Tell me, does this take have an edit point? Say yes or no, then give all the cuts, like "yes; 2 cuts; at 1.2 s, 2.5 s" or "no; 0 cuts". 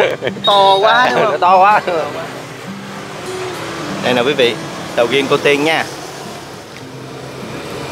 no; 0 cuts